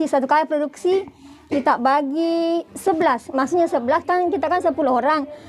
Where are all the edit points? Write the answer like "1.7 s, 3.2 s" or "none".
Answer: none